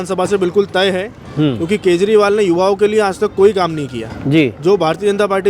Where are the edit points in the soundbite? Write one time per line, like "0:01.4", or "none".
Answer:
none

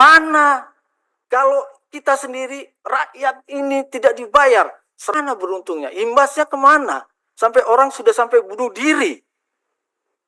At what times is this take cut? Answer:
0:05.1

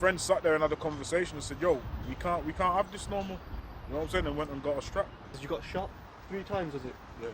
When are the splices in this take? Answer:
0:05.4

